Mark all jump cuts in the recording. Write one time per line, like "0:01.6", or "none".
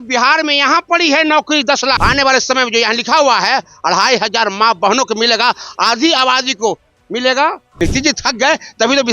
0:02.0
0:07.7